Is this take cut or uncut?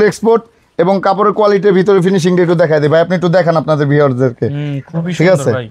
uncut